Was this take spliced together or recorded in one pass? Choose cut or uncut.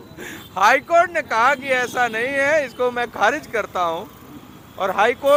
uncut